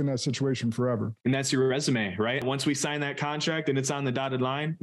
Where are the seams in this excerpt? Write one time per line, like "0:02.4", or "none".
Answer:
0:01.1
0:02.4